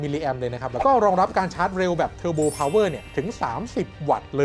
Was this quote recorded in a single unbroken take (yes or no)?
yes